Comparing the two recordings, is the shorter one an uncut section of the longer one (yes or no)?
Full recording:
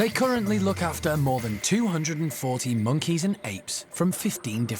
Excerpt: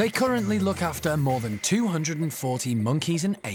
yes